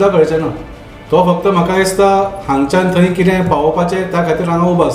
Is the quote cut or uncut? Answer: uncut